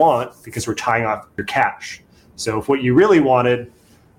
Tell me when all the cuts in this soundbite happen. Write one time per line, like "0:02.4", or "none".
0:01.3